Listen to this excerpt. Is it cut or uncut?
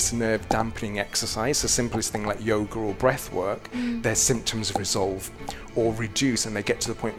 uncut